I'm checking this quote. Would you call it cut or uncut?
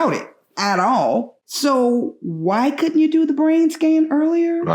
cut